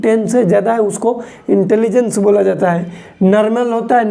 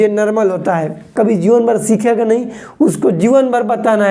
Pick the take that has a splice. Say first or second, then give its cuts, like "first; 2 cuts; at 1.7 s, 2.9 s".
second; 1 cut; at 1.1 s